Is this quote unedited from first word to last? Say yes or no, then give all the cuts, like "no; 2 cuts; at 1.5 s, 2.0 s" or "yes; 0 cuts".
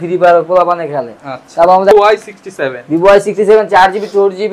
no; 1 cut; at 1.9 s